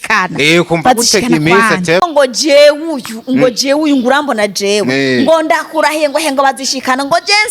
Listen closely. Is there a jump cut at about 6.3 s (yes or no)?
no